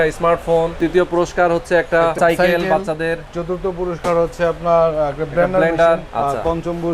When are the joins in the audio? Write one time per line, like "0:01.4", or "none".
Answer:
0:00.8
0:02.2
0:06.1

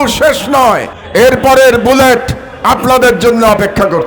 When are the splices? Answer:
0:00.9

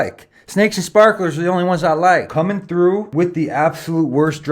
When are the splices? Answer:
0:02.3
0:03.1

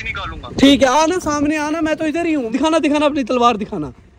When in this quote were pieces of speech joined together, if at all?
0:02.5

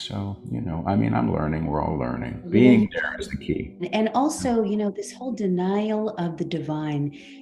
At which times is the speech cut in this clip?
0:02.5
0:03.9

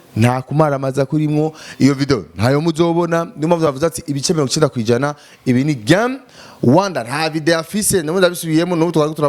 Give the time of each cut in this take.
none

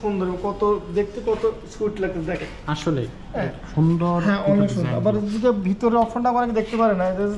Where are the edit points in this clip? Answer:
none

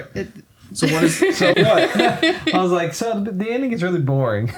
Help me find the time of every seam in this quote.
0:01.6

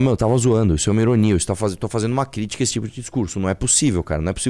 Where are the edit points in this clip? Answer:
none

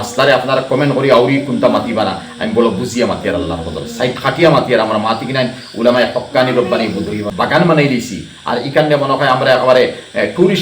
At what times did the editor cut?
0:07.3

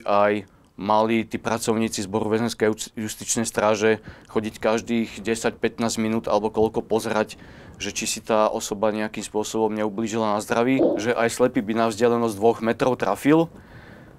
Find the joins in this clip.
0:10.9

